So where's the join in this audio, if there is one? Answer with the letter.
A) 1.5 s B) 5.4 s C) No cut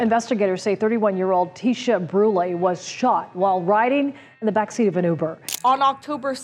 B